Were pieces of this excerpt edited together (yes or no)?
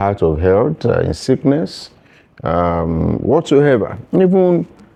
no